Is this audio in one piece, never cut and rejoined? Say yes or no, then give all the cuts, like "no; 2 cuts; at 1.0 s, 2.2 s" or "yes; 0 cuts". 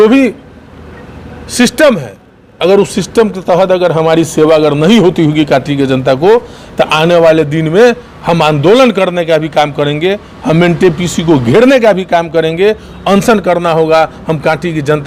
yes; 0 cuts